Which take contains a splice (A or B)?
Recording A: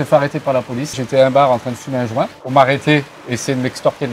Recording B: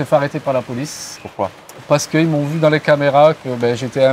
A